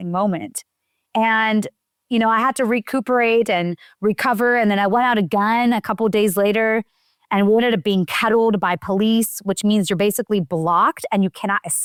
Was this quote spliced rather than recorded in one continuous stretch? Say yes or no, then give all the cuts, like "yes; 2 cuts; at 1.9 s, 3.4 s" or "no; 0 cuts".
no; 0 cuts